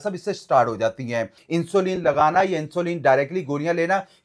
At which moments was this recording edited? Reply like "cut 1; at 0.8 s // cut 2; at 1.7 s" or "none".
cut 1; at 1.4 s